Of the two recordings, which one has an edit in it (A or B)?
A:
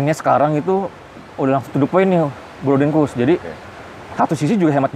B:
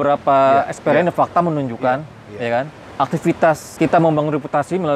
B